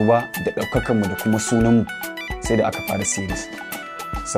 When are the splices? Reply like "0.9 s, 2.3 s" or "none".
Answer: none